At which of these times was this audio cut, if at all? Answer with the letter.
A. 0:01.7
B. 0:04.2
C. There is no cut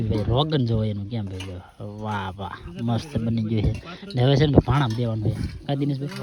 C